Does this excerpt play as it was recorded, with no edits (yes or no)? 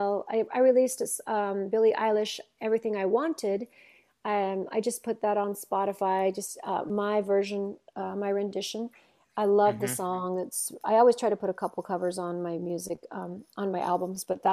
yes